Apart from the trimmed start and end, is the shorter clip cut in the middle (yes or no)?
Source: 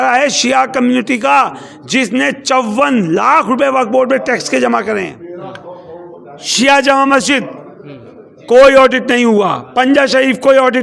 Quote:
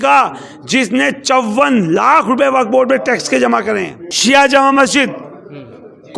yes